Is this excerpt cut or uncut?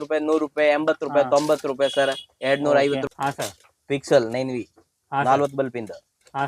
cut